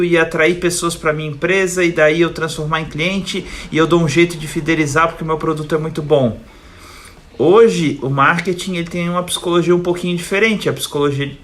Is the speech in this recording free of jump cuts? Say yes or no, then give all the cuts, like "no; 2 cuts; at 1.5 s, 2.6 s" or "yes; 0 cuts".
yes; 0 cuts